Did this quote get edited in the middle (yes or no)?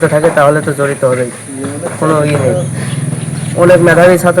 no